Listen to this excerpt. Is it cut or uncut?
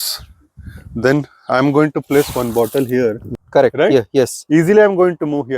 cut